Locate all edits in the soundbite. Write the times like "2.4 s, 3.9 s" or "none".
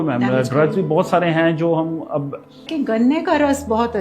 2.7 s